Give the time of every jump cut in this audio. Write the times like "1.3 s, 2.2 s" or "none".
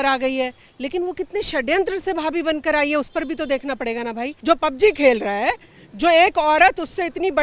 4.3 s